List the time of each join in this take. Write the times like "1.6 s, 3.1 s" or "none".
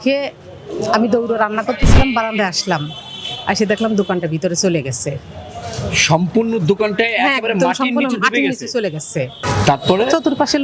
9.4 s